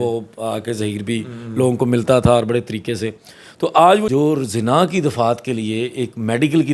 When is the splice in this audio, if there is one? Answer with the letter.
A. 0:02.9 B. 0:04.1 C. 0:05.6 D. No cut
B